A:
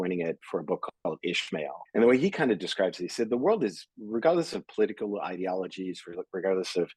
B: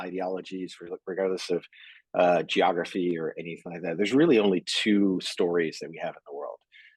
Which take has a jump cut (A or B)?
A